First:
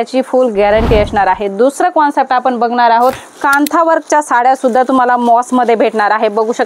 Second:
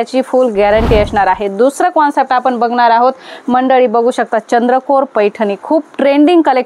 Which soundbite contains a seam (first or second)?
first